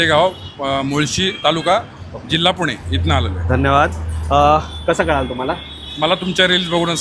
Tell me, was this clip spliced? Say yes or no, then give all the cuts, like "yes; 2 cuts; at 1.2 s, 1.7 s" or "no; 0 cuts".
no; 0 cuts